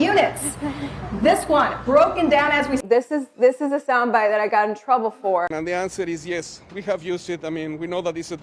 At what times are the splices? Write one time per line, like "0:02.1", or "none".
0:02.8
0:05.5